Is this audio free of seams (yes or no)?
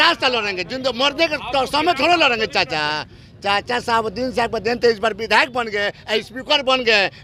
yes